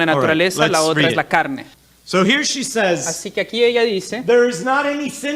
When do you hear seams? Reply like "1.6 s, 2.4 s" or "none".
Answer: 1.9 s